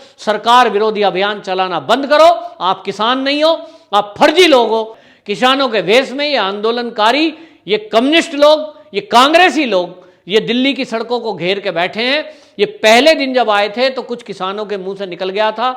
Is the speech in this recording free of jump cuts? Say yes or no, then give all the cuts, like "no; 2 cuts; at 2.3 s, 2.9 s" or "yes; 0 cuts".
no; 1 cut; at 5.0 s